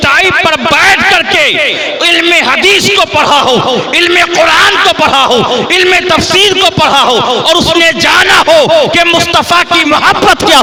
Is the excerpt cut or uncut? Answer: uncut